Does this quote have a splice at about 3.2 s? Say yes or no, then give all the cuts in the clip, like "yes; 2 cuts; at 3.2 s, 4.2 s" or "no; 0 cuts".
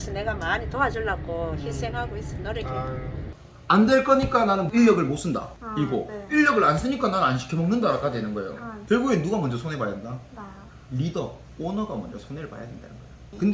yes; 1 cut; at 3.2 s